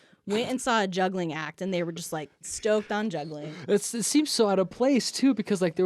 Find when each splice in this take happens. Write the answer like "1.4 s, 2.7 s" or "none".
2.5 s, 3.4 s